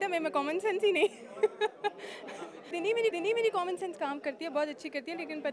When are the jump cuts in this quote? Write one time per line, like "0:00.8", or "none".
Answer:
0:03.0